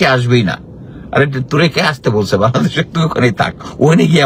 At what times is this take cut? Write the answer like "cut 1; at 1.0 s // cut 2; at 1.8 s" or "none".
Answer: none